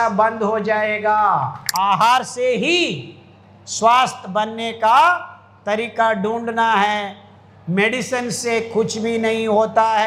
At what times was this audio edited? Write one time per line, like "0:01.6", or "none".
0:01.6

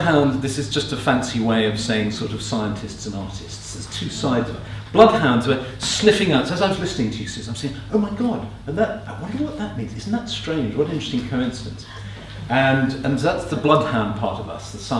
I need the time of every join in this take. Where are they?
0:10.0

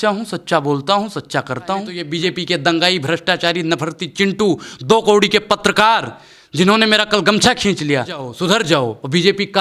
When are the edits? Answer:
0:02.0
0:08.3

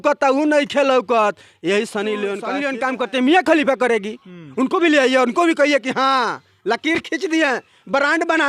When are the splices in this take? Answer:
0:02.5

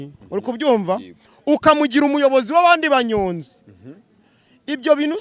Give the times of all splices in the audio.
none

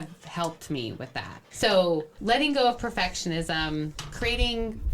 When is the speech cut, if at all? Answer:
0:01.5

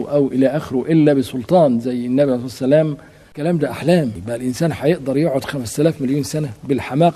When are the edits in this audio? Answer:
0:03.3
0:04.2

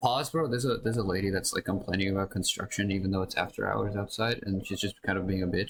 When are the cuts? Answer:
none

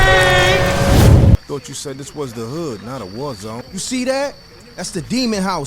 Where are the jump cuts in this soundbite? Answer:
0:01.3

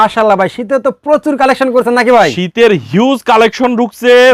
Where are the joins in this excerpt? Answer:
none

